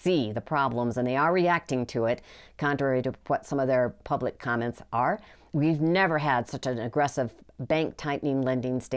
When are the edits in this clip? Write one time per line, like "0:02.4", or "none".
0:05.4